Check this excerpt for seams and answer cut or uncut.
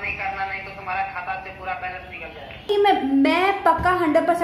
cut